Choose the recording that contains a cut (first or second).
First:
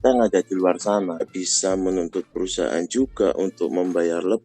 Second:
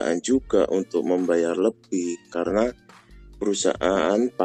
first